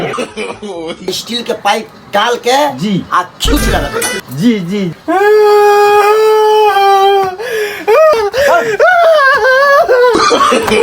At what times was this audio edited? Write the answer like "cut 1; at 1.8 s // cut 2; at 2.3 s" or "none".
cut 1; at 1.1 s // cut 2; at 4.9 s // cut 3; at 8.1 s